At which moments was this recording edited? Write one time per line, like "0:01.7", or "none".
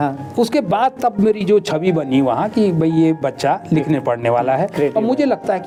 none